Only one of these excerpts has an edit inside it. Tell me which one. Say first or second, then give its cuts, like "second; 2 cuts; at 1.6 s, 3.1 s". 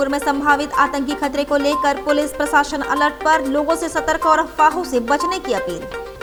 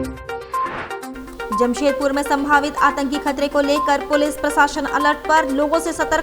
second; 1 cut; at 1.1 s